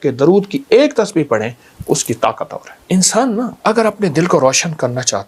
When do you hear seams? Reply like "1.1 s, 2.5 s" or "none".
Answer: 2.7 s, 3.5 s